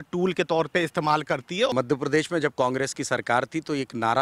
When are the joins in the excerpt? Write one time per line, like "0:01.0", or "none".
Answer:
0:01.7